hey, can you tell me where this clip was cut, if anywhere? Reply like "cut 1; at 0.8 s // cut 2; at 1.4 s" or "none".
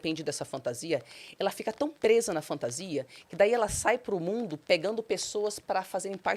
none